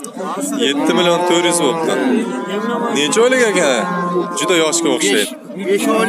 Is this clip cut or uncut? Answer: uncut